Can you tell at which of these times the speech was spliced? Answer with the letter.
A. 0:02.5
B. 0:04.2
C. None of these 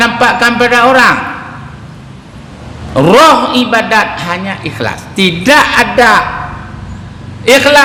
C